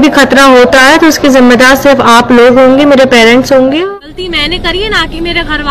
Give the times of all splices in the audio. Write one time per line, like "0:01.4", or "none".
0:03.8

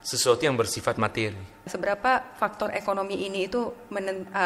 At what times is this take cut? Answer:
0:01.7

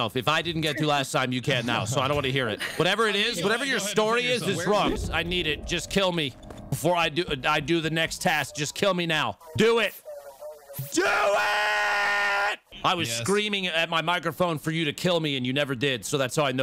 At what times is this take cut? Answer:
0:05.0
0:09.4
0:12.7

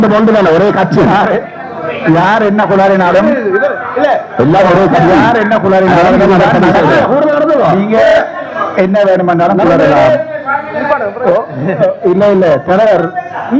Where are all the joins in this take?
none

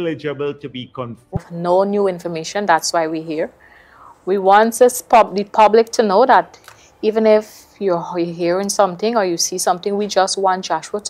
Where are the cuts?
0:01.4

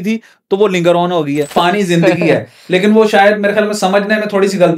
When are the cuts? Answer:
0:01.5

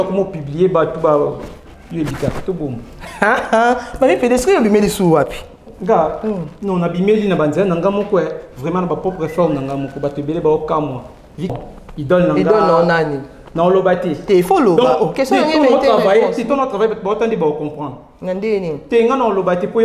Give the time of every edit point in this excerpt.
0:11.5

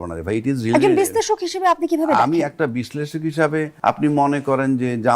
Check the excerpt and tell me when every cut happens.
0:03.7

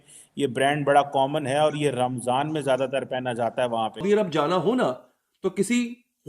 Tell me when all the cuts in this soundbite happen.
0:04.0

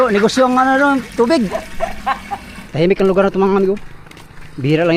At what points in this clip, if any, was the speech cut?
0:02.5

